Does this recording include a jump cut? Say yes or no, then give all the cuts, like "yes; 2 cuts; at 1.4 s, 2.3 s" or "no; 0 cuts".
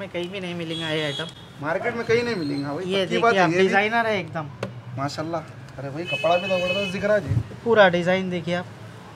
no; 0 cuts